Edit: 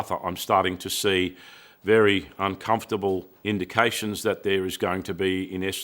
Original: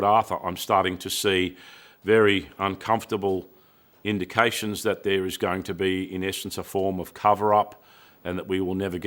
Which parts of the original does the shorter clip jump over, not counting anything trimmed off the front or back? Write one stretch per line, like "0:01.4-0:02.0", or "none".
0:03.5-0:03.9